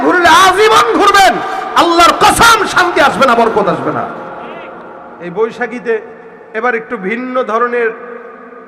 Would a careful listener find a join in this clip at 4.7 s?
yes; 1 cut; at 4.7 s

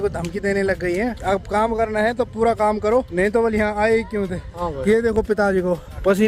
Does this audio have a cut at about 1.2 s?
no; 0 cuts

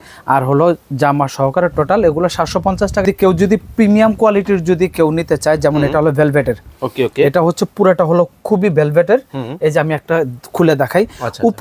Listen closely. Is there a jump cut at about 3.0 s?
yes; 1 cut; at 3.0 s

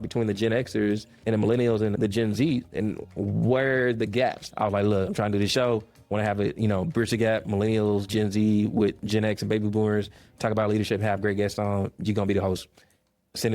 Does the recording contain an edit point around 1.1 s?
yes; 3 cuts; at 1.1 s, 2.0 s, 4.4 s

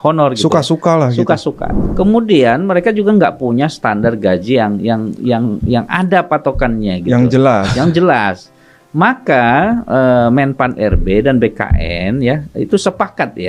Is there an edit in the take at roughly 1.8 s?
yes; 1 cut; at 1.8 s

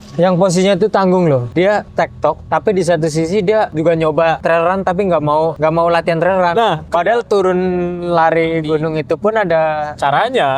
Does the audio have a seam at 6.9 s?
yes; 5 cuts; at 1.8 s, 3.7 s, 4.4 s, 5.5 s, 6.9 s

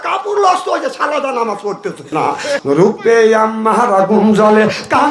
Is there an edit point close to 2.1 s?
yes; 1 cut; at 2.1 s

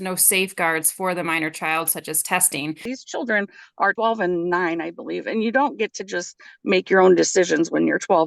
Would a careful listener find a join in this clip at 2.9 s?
yes; 2 cuts; at 2.9 s, 3.9 s

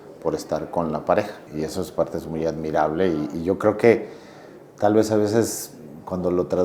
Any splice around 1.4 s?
yes; 1 cut; at 1.4 s

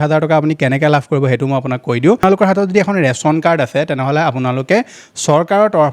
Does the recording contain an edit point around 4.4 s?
no; 1 cut; at 2.2 s

